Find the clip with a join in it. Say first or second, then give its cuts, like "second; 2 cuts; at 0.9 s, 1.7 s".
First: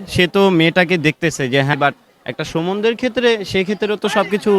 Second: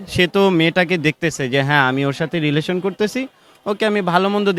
first; 1 cut; at 1.7 s